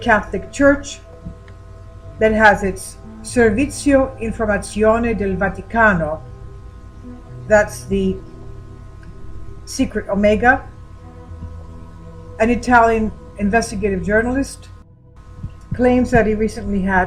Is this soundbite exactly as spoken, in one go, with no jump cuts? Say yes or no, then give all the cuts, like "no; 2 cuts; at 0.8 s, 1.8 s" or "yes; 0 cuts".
no; 1 cut; at 8.2 s